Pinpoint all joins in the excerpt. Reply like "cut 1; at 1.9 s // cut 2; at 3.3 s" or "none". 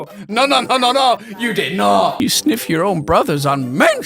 cut 1; at 2.2 s